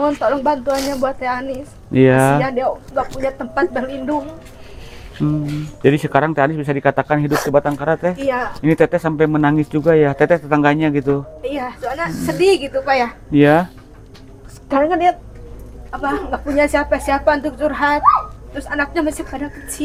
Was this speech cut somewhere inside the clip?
no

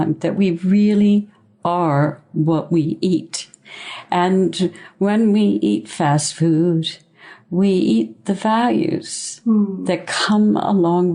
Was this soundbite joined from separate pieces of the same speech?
no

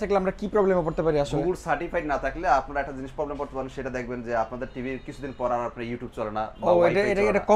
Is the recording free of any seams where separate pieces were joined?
yes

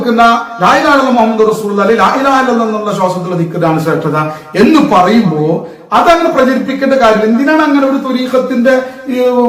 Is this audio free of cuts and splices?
yes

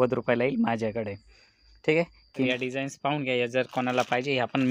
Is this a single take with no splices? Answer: no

